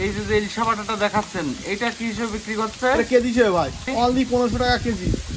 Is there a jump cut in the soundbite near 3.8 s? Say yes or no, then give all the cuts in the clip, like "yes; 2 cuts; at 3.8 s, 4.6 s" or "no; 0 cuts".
yes; 1 cut; at 3.8 s